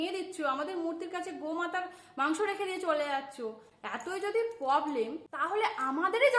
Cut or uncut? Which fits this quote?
cut